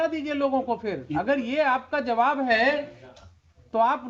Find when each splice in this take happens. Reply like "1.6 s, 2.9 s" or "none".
none